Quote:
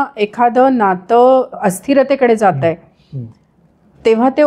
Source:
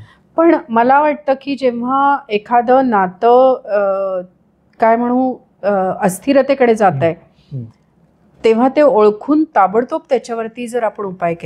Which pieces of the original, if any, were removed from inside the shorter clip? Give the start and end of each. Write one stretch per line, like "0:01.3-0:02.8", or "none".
0:03.7-0:05.9